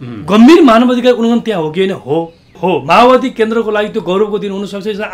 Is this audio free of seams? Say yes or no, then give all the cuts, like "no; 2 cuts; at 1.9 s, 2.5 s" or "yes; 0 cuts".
no; 1 cut; at 2.5 s